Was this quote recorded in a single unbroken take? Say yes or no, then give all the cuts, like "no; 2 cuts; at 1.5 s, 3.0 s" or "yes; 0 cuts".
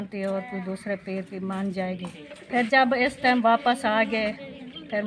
no; 1 cut; at 2.7 s